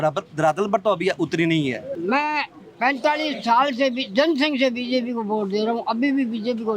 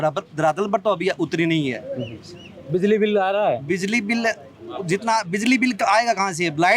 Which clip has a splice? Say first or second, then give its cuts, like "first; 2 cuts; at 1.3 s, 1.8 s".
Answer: first; 1 cut; at 1.9 s